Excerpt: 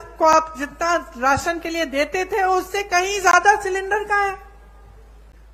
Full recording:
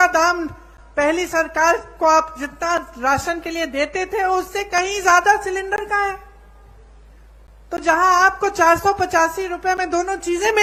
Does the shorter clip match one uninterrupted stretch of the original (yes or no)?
yes